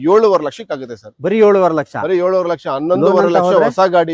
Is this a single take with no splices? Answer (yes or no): yes